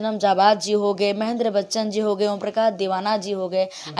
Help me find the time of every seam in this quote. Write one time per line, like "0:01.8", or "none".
none